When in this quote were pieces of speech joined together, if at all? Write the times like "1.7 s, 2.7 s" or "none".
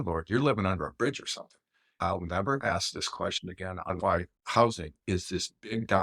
2.0 s, 3.9 s